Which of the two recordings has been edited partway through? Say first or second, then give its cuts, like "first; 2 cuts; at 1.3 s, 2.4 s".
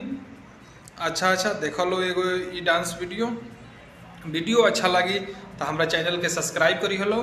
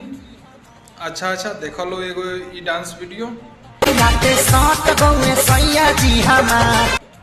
first; 1 cut; at 3.8 s